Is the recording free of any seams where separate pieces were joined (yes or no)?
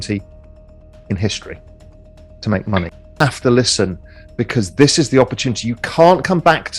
no